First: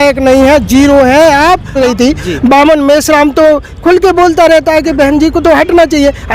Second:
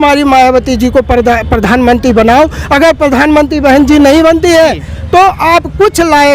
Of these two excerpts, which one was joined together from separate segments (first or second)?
first